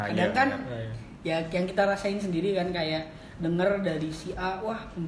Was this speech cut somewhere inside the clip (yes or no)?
no